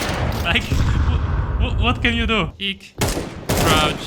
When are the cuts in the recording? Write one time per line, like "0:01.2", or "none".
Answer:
0:02.6